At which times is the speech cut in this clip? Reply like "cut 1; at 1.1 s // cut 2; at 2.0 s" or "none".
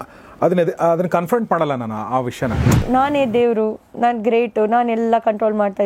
cut 1; at 2.8 s